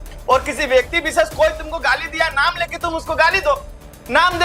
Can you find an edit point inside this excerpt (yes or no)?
no